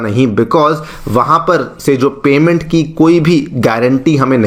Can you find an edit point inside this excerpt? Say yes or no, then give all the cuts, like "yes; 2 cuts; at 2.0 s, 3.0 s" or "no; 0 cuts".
no; 0 cuts